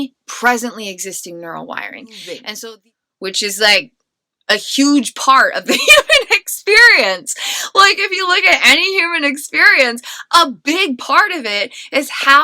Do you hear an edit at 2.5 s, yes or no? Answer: yes